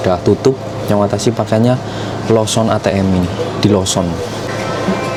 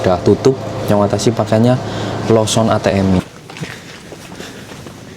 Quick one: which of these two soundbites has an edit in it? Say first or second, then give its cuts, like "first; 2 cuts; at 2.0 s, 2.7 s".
second; 1 cut; at 3.2 s